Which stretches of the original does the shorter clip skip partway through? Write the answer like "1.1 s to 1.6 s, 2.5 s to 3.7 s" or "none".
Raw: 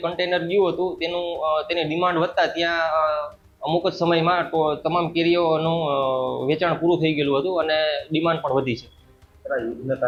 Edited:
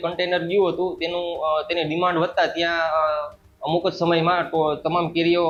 none